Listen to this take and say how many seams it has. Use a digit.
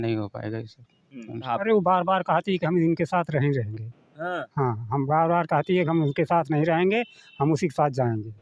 1